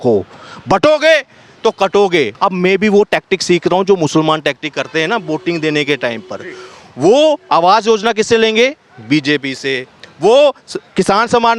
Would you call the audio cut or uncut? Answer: cut